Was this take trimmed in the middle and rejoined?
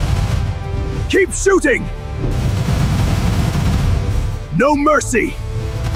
no; 0 cuts

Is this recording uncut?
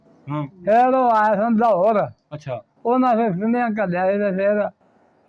yes; 0 cuts

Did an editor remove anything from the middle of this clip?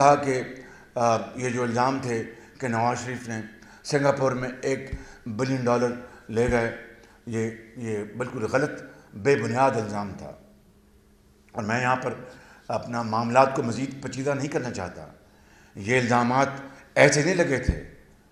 no; 0 cuts

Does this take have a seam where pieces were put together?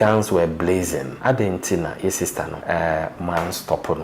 yes; 2 cuts; at 1.1 s, 2.6 s

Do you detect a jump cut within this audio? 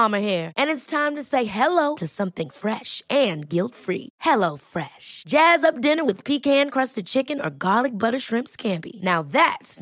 no; 0 cuts

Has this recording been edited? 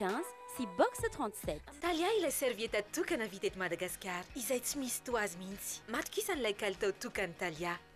yes; 1 cut; at 1.7 s

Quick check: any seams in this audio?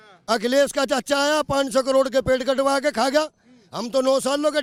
no; 0 cuts

